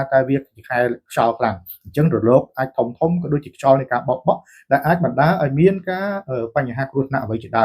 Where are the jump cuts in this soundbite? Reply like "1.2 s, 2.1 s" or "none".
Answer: none